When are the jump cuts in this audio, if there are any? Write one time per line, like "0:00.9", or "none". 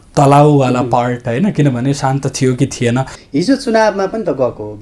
0:03.2